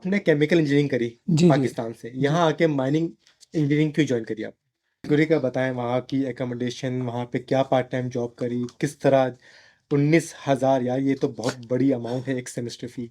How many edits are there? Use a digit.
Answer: 1